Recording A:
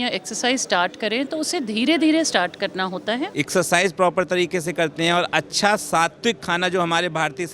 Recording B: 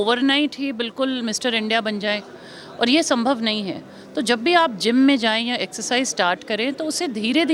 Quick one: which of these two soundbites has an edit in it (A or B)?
A